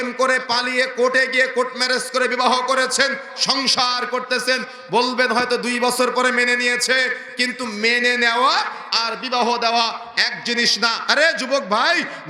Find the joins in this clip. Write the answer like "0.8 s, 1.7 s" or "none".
11.0 s